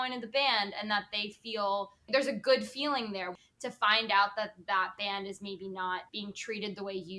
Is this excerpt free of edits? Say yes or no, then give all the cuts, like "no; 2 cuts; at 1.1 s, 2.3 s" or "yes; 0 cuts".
no; 3 cuts; at 2.1 s, 3.3 s, 6.1 s